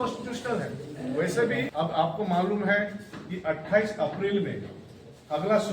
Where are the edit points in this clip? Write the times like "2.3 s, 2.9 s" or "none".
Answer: 1.7 s